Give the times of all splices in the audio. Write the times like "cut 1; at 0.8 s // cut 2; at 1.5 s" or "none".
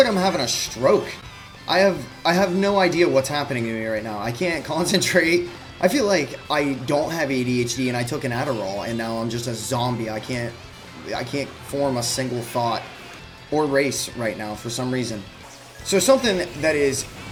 none